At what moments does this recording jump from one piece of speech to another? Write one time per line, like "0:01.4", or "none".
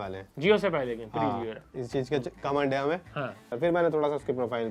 0:03.4